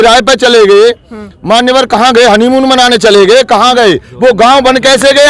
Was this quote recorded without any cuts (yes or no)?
yes